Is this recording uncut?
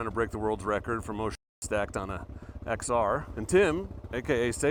yes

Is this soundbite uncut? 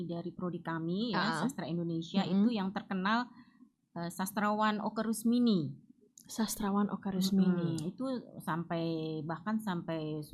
yes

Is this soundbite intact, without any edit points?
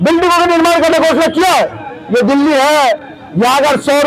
no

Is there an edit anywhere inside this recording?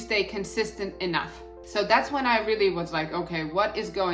yes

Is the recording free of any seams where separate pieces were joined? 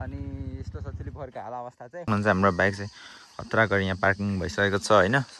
no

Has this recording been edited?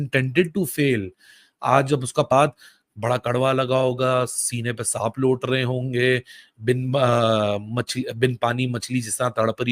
yes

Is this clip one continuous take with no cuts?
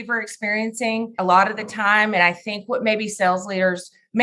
no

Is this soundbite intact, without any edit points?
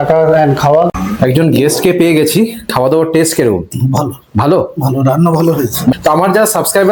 no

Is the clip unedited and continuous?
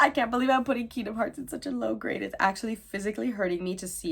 yes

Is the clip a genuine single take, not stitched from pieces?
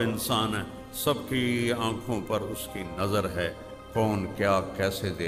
yes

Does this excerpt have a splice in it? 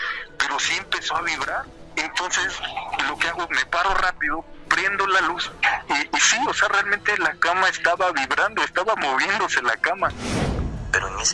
yes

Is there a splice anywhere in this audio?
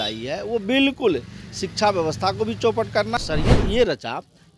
yes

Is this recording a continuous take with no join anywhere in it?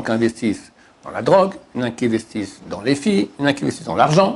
yes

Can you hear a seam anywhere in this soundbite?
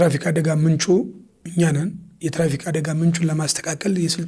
no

